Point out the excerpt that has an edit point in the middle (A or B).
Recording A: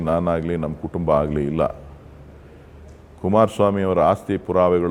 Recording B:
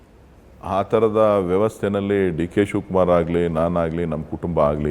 B